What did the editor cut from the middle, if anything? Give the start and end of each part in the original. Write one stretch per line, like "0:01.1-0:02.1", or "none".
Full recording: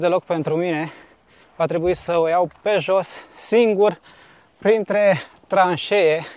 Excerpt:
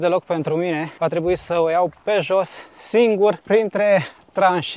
0:00.9-0:01.5
0:04.0-0:04.6